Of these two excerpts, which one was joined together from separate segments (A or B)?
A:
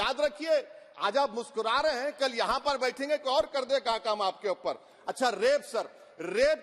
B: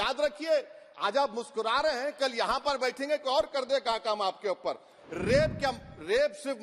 B